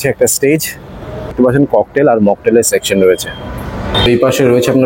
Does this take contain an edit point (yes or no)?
yes